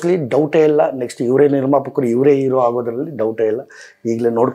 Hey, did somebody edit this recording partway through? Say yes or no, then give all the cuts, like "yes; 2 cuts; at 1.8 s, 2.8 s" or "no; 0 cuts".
no; 0 cuts